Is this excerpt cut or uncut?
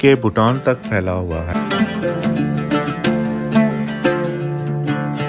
cut